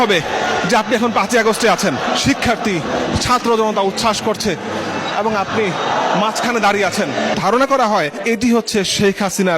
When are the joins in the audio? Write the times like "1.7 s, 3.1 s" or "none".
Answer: 2.1 s, 7.3 s

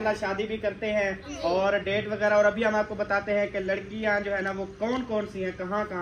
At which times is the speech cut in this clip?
1.3 s

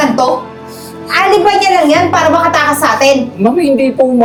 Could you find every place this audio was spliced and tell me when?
none

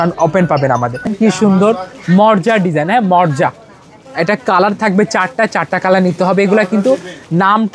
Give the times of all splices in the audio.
1.1 s

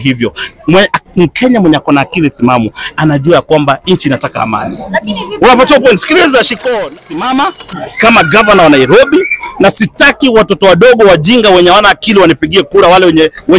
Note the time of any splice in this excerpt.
6.6 s

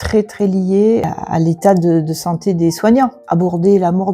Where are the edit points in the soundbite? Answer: 1.1 s, 3.2 s

